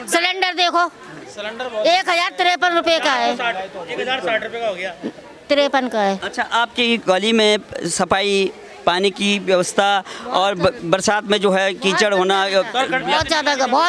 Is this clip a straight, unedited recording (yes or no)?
yes